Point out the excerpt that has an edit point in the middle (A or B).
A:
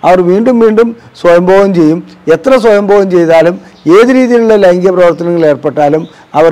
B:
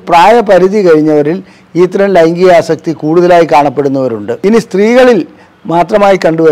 B